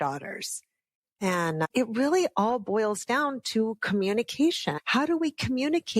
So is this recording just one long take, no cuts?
no; 2 cuts; at 1.7 s, 4.7 s

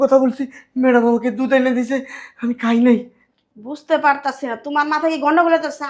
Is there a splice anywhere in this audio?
no; 0 cuts

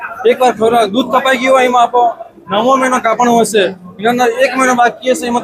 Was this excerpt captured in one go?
yes; 0 cuts

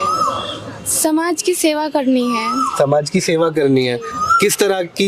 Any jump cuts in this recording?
no; 0 cuts

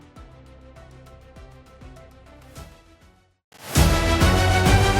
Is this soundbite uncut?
no; 1 cut; at 3.5 s

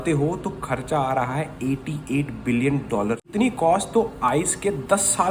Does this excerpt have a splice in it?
yes; 1 cut; at 3.3 s

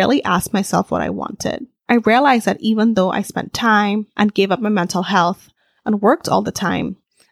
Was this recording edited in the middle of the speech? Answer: no; 0 cuts

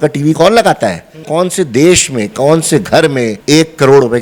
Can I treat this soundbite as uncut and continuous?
no; 2 cuts; at 1.2 s, 3.4 s

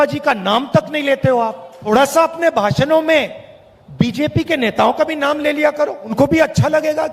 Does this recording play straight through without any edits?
no; 1 cut; at 1.7 s

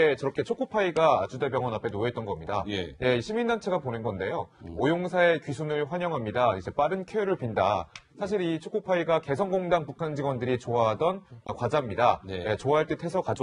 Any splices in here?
no; 0 cuts

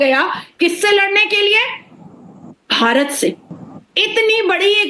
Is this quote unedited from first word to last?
yes; 0 cuts

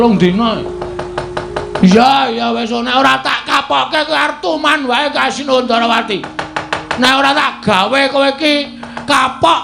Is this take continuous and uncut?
yes; 0 cuts

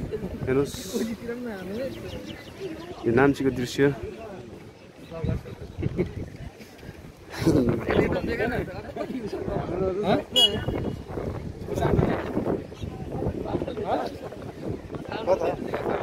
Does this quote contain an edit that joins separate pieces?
no; 0 cuts

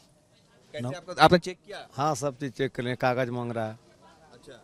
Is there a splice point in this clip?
no; 0 cuts

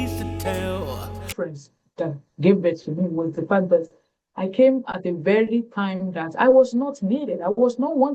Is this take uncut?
no; 1 cut; at 1.3 s

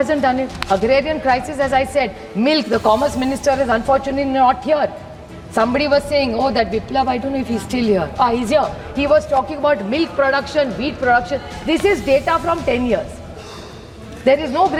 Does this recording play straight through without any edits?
yes; 0 cuts

